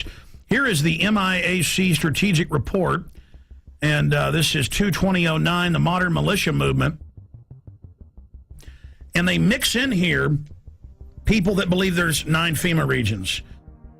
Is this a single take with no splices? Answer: no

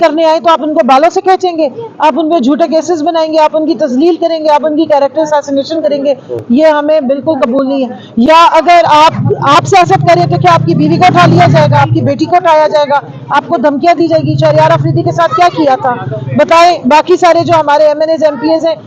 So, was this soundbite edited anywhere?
no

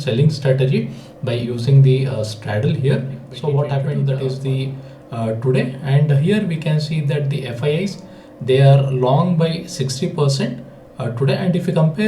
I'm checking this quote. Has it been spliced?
yes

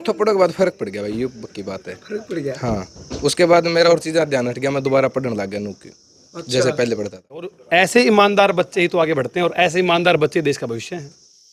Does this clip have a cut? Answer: yes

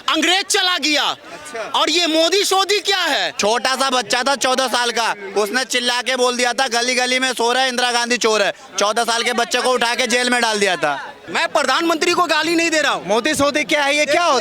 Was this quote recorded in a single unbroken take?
no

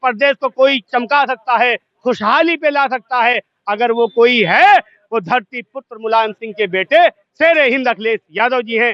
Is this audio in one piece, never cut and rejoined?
yes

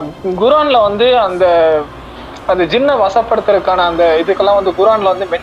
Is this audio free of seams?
yes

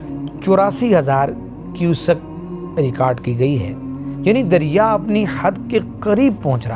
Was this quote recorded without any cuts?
no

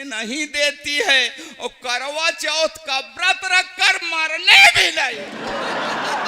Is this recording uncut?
no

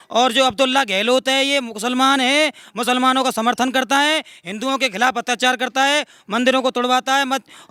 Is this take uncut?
yes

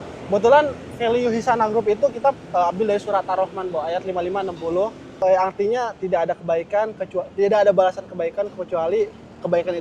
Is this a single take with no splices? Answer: yes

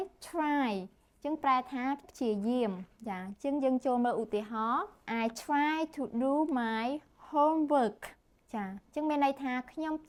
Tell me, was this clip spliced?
no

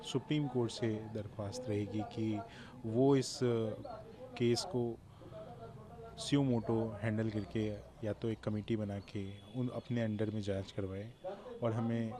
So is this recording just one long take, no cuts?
yes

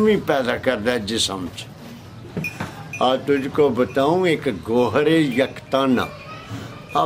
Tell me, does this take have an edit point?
yes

